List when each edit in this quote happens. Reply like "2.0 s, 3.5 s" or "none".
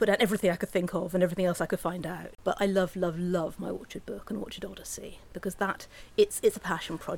2.2 s